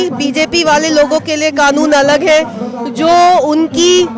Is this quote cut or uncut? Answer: uncut